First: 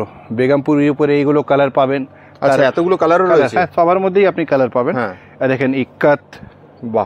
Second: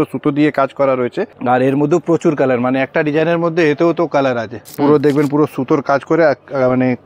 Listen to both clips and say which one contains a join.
second; 2 cuts; at 1.3 s, 4.6 s

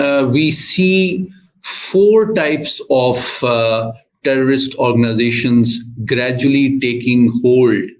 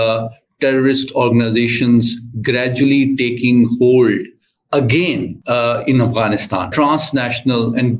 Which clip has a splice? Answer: second; 2 cuts; at 5.4 s, 6.7 s

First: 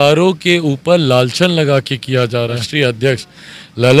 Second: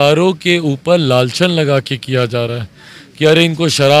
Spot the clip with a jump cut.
first; 1 cut; at 2.7 s

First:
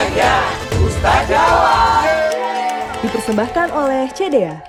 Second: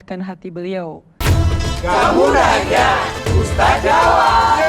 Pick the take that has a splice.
second; 1 cut; at 1.0 s

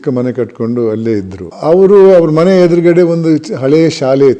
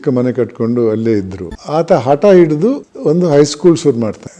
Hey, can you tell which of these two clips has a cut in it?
second; 1 cut; at 1.5 s

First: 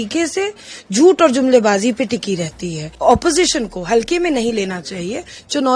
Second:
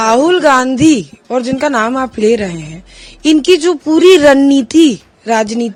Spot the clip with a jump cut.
first; 1 cut; at 2.9 s

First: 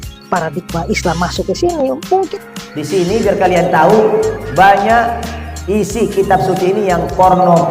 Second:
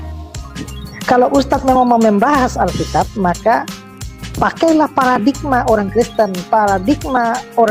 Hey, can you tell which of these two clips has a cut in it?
first; 1 cut; at 2.3 s

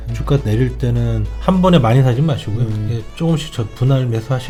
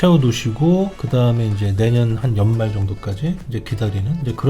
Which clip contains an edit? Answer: second; 1 cut; at 1.0 s

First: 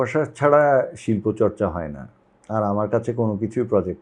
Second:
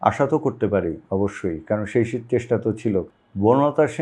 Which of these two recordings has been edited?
second; 1 cut; at 3.1 s

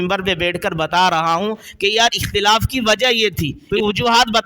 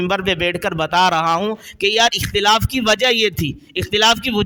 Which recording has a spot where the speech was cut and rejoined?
first; 1 cut; at 3.5 s

